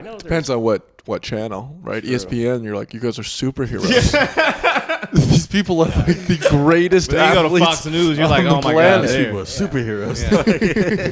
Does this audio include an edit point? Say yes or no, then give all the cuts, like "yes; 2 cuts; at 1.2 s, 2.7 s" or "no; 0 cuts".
no; 0 cuts